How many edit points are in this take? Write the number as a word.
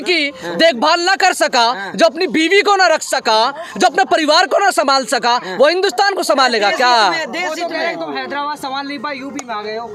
zero